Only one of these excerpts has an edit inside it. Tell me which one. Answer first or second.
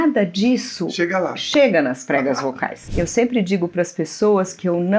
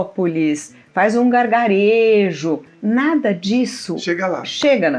first